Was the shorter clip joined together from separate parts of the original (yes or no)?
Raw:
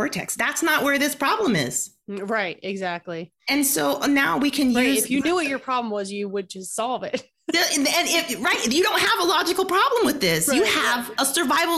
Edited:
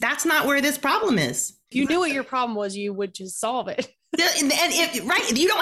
yes